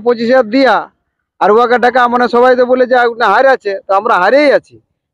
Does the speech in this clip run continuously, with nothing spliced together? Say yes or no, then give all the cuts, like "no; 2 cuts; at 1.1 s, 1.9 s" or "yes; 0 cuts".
yes; 0 cuts